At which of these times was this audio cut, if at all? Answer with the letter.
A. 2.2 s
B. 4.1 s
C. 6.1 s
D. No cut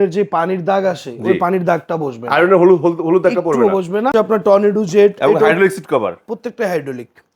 B